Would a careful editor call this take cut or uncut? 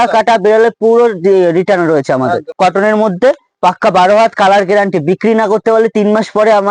cut